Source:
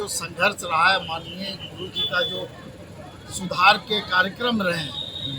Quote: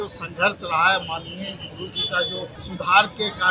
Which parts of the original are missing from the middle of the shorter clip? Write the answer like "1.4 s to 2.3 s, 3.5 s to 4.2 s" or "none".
2.6 s to 3.3 s

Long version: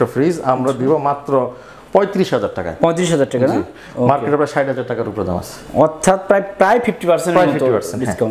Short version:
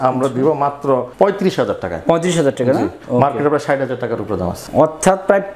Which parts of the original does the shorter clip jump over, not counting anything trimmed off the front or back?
1.5 s to 1.8 s, 3.7 s to 3.9 s, 5.5 s to 5.6 s

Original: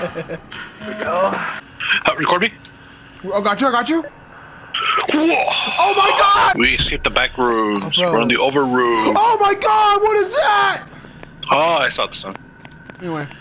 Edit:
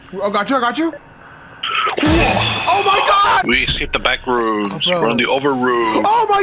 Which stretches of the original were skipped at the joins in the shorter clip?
none

